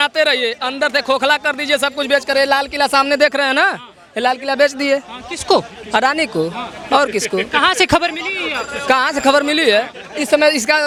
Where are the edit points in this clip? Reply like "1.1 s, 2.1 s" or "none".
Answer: none